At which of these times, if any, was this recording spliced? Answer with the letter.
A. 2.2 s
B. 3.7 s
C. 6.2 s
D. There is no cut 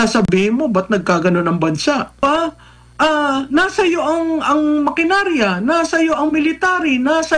A